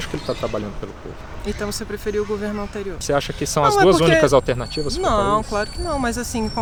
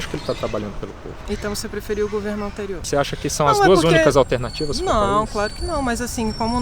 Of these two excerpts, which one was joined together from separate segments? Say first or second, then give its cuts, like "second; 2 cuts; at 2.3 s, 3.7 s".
second; 1 cut; at 1.1 s